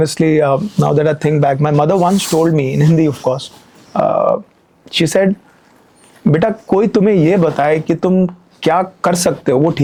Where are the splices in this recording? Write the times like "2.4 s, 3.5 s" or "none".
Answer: none